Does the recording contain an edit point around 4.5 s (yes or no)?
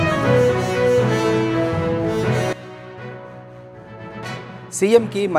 no